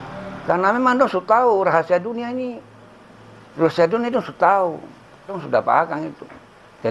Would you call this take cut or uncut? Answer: cut